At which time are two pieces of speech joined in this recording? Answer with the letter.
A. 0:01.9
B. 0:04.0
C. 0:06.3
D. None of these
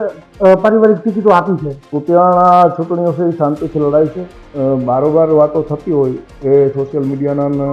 A